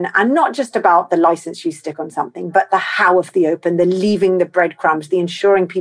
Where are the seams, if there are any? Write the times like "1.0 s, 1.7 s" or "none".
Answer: none